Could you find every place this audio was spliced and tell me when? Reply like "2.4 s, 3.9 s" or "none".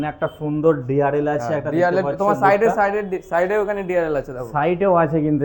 none